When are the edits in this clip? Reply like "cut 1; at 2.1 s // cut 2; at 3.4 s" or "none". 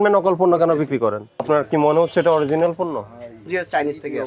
cut 1; at 1.4 s